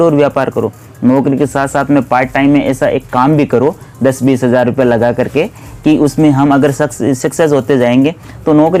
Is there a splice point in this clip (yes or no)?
no